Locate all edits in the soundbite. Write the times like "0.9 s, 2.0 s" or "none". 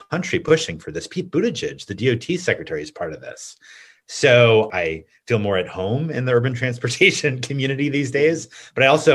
4.7 s